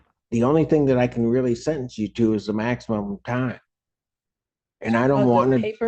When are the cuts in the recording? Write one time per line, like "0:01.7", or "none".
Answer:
0:04.6

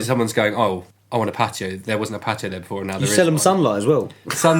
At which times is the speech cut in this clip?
0:00.9

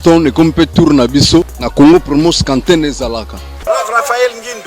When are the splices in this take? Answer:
0:01.6
0:03.6

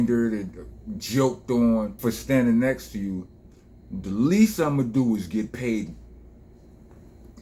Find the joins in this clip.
0:01.9

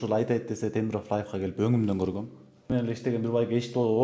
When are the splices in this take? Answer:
0:02.7

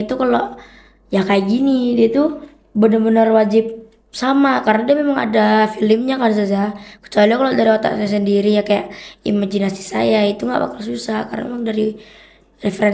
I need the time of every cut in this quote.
none

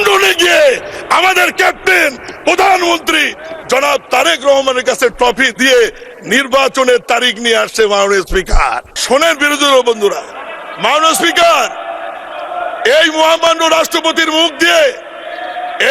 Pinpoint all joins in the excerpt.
0:08.9

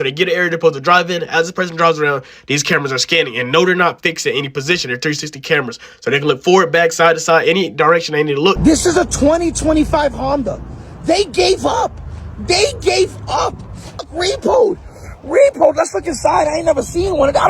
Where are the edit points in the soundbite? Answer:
0:08.6
0:14.0

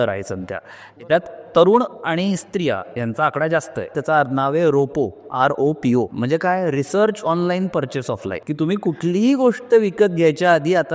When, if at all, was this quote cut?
0:04.0
0:06.1
0:08.4

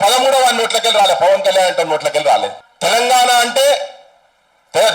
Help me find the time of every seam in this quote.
0:02.6

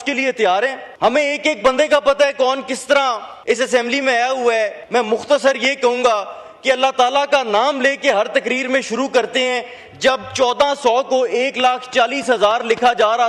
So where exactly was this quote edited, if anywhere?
0:00.9
0:03.3
0:04.8

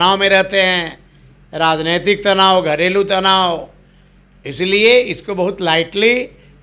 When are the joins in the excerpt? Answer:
none

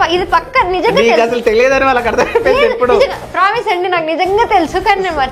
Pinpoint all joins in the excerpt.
none

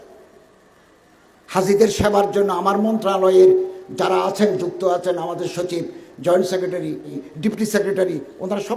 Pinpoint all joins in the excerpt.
0:07.2

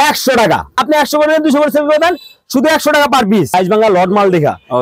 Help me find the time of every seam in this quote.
0:00.8
0:03.5

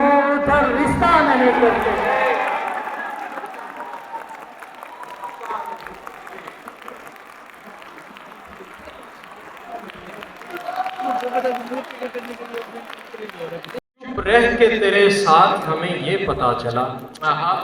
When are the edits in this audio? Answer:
0:13.8

